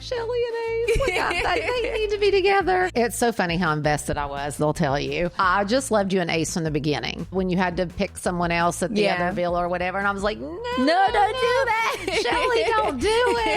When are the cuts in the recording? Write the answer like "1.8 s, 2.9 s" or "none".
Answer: 2.9 s, 5.3 s, 7.3 s